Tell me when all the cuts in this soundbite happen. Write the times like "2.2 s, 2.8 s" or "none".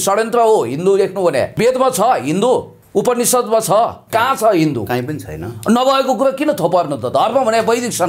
1.5 s, 2.8 s, 4.0 s